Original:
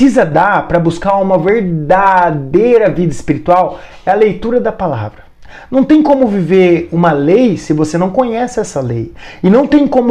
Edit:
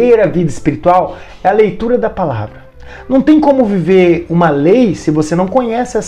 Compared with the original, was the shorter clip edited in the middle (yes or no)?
no